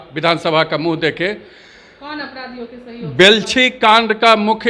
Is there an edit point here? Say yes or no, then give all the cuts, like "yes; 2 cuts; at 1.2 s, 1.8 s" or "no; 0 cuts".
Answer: no; 0 cuts